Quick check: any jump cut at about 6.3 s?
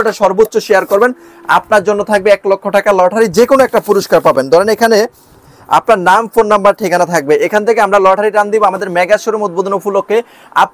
no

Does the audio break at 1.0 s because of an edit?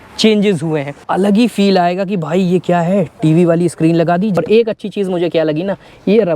yes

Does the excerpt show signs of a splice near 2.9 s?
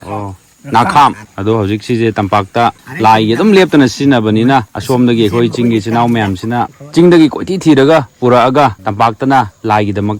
yes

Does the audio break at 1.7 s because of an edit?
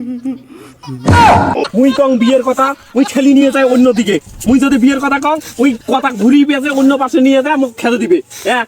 yes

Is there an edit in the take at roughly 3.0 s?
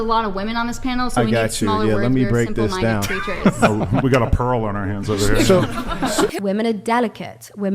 no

